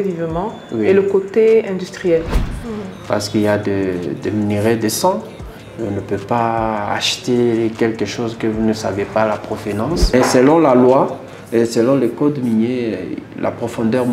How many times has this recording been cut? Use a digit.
2